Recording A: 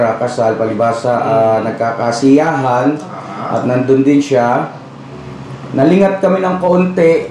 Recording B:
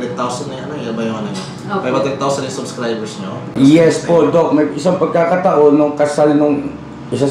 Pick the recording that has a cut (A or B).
B